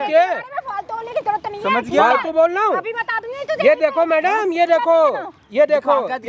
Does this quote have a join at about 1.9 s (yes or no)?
no